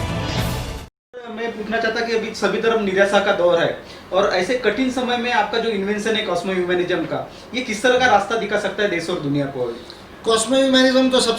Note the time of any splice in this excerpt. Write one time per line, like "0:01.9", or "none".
0:01.3